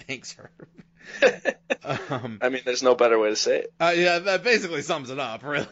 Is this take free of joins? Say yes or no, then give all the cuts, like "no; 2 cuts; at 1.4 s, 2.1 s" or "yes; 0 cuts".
yes; 0 cuts